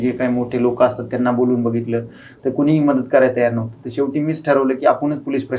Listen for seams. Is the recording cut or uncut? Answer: uncut